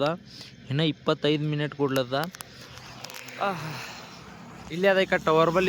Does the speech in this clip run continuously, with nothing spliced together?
yes; 0 cuts

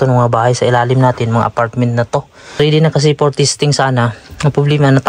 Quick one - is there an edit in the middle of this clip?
no; 0 cuts

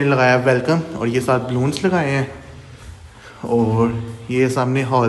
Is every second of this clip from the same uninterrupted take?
yes; 0 cuts

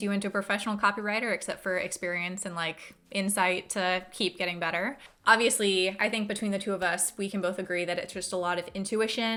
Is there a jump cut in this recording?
no; 0 cuts

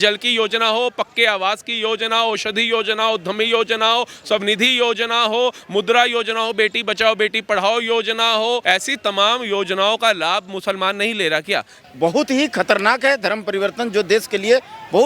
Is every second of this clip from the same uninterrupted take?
no; 2 cuts; at 8.6 s, 11.8 s

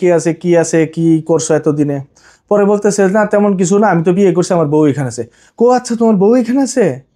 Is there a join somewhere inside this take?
no; 0 cuts

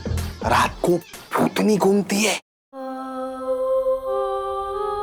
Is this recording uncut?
yes; 0 cuts

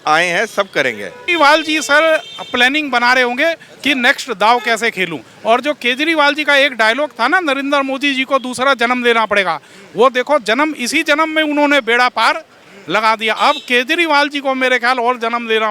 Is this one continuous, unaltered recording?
no; 1 cut; at 1.2 s

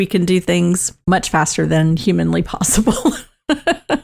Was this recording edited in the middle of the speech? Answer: yes; 1 cut; at 0.9 s

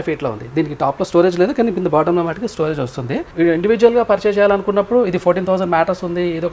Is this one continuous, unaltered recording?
yes; 0 cuts

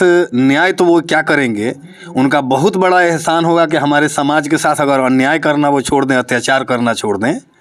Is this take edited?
no; 0 cuts

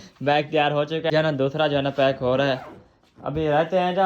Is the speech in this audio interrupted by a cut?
yes; 1 cut; at 1.1 s

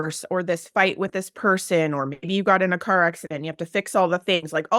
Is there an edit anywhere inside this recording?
no; 0 cuts

